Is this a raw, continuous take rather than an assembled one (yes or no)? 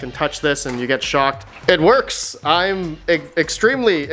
no